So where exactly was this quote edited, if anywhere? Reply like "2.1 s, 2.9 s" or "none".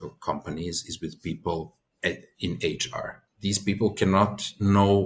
1.8 s, 3.2 s